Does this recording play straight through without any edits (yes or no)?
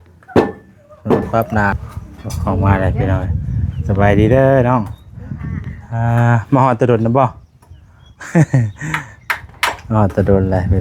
no